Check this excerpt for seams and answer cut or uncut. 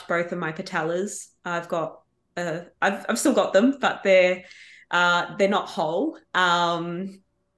uncut